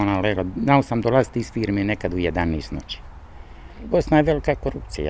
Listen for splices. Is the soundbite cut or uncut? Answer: cut